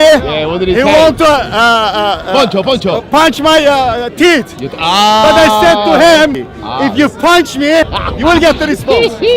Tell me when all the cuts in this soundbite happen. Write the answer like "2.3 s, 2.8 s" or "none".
6.4 s, 8.0 s

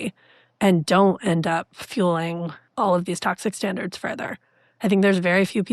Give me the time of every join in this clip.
2.6 s

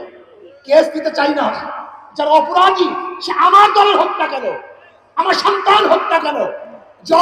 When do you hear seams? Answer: none

